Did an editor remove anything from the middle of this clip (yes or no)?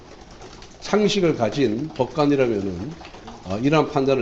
no